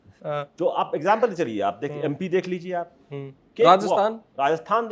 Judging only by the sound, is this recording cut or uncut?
uncut